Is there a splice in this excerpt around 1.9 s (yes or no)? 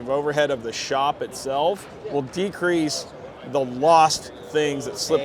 yes